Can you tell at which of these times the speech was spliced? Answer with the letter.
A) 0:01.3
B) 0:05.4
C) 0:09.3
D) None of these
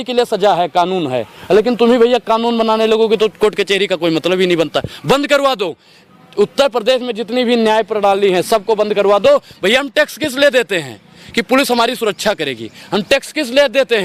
D